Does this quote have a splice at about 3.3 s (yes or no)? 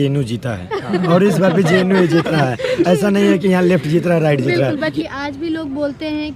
no